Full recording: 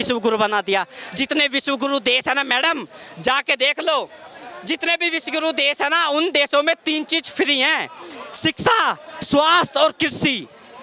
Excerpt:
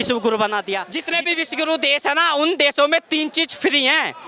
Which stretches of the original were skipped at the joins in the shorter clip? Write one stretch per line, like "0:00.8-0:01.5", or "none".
0:00.9-0:04.7